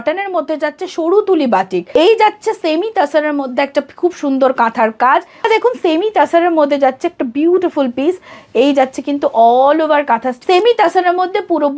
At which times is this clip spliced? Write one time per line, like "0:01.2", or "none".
0:01.9
0:05.5
0:10.3